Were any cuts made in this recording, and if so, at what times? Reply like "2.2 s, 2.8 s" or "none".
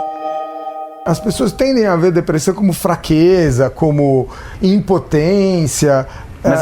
0.9 s